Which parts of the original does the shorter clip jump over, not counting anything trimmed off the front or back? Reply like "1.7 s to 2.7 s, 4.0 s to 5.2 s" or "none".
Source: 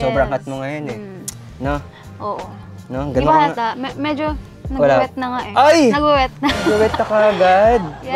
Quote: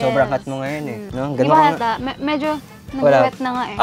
1.0 s to 2.8 s